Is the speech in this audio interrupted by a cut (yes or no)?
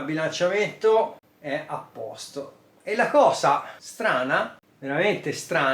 yes